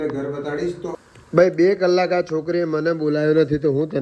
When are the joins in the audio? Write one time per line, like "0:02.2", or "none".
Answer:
0:01.0